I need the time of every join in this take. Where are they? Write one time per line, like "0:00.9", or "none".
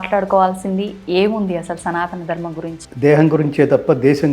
0:02.8